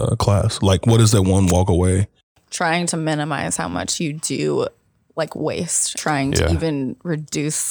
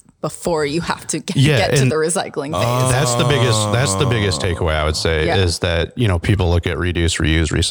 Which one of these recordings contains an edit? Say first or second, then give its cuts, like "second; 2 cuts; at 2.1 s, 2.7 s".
first; 2 cuts; at 2.3 s, 5.9 s